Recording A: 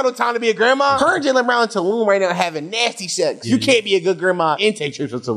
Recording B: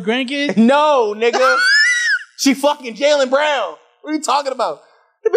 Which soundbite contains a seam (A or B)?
A